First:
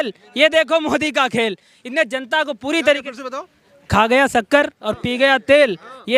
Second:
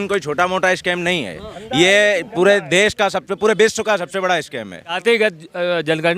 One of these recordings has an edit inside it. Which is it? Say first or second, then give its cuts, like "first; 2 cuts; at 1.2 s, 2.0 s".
second; 1 cut; at 5.0 s